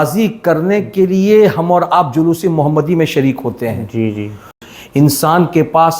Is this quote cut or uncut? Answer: cut